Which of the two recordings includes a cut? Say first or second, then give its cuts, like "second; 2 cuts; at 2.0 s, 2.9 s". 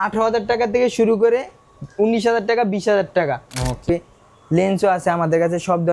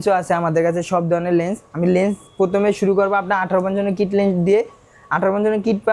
first; 1 cut; at 3.9 s